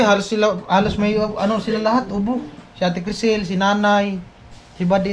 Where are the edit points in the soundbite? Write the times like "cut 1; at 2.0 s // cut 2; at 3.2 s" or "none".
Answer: none